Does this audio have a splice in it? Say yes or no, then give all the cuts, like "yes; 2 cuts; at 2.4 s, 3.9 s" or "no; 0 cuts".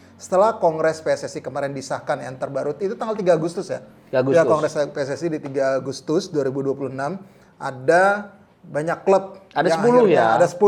no; 0 cuts